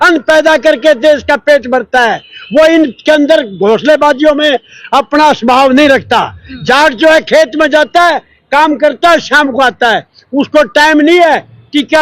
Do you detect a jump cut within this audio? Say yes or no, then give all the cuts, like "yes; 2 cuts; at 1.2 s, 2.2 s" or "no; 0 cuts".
no; 0 cuts